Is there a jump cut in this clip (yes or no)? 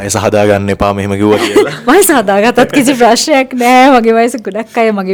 no